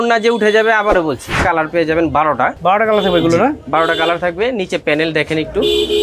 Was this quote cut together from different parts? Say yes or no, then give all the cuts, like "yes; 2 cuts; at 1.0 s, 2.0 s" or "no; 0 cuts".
yes; 2 cuts; at 1.4 s, 2.5 s